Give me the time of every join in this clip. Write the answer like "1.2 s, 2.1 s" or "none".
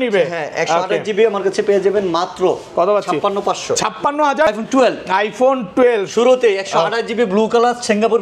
4.5 s